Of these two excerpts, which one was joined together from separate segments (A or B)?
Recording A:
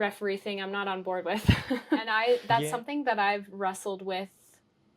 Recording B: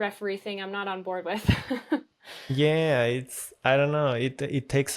A